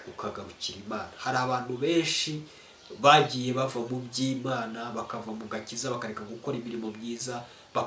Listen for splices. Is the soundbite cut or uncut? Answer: uncut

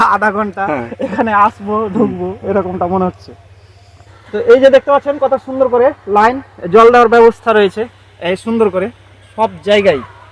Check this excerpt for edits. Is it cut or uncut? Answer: uncut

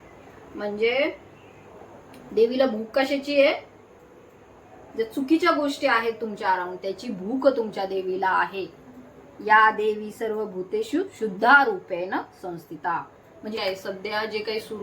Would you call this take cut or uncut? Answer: cut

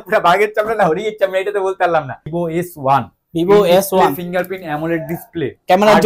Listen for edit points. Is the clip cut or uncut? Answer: cut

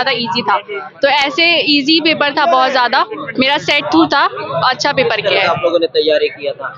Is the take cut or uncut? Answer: uncut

